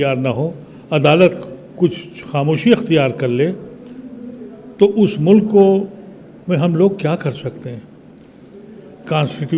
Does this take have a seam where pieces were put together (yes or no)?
no